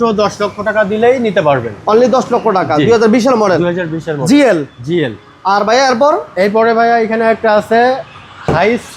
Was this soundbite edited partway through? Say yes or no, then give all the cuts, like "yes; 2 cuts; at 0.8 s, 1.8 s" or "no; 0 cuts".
no; 0 cuts